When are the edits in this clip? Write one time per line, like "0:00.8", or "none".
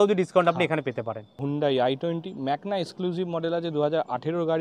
0:01.4